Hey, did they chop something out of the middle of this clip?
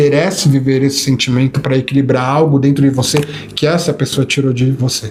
no; 0 cuts

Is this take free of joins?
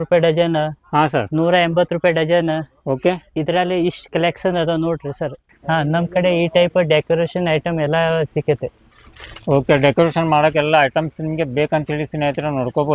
no; 1 cut; at 5.5 s

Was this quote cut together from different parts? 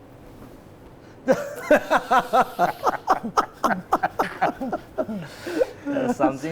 no; 0 cuts

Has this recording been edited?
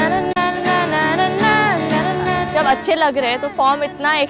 yes; 1 cut; at 2.5 s

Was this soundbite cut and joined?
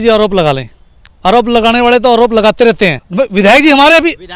yes; 1 cut; at 3.0 s

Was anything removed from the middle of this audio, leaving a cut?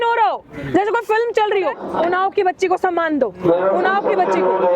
yes; 1 cut; at 1.8 s

